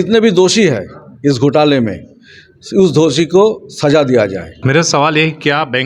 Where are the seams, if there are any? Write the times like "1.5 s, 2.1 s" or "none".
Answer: 4.5 s